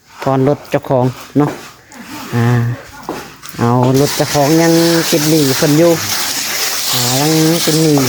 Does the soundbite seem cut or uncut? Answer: uncut